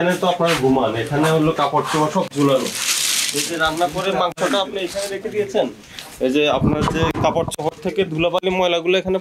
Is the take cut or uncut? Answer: uncut